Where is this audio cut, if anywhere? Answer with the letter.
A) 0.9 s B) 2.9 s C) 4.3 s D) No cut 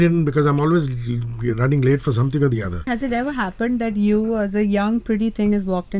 B